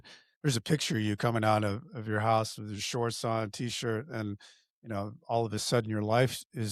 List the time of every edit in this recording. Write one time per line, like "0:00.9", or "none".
none